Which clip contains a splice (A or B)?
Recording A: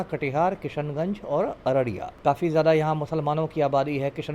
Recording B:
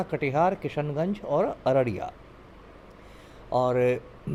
A